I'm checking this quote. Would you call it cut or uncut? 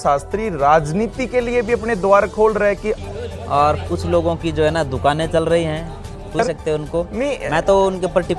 cut